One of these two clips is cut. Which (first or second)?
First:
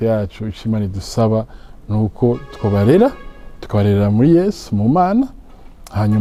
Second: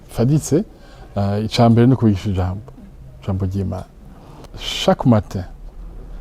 second